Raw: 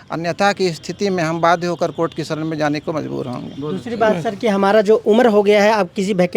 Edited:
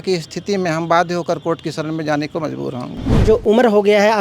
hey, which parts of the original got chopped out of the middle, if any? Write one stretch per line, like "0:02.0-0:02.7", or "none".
0:03.8-0:04.8